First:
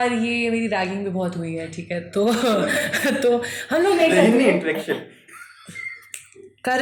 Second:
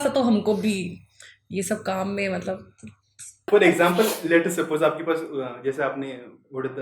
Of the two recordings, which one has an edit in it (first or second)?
second